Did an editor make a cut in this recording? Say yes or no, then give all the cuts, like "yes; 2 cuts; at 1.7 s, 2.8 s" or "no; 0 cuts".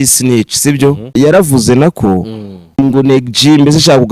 yes; 2 cuts; at 1.1 s, 2.8 s